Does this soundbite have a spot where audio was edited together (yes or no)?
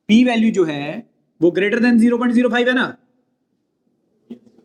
no